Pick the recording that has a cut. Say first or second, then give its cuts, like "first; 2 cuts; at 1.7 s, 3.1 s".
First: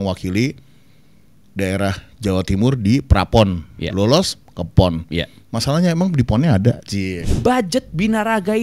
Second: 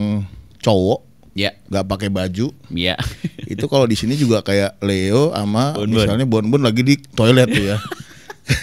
first; 1 cut; at 7.3 s